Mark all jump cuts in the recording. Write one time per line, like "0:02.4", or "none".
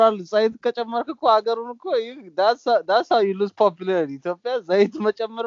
none